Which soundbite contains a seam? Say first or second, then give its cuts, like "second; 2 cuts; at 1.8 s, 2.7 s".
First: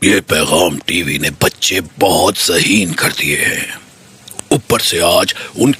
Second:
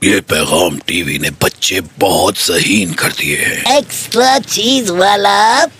second; 1 cut; at 3.6 s